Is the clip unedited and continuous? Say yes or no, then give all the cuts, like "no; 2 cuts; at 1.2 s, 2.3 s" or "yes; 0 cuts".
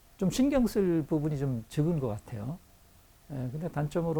yes; 0 cuts